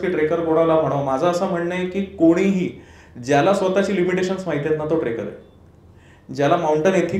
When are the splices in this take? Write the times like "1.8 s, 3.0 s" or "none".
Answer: none